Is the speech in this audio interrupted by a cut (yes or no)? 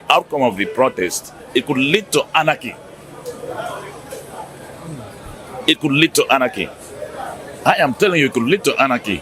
no